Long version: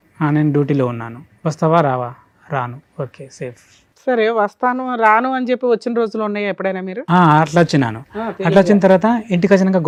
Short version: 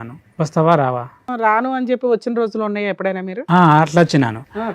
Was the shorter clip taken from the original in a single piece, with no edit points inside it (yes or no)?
no